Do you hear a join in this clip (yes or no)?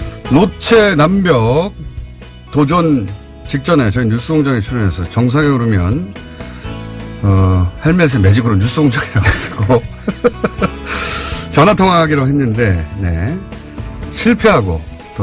no